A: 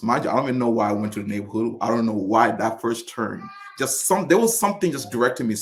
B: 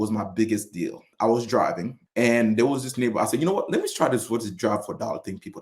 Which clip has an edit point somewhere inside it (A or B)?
B